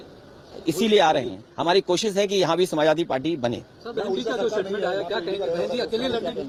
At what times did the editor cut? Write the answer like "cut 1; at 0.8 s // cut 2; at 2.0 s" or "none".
none